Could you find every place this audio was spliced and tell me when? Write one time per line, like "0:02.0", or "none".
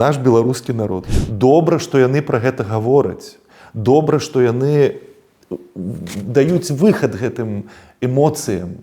0:01.1